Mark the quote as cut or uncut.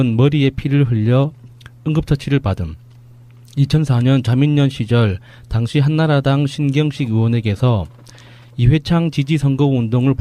uncut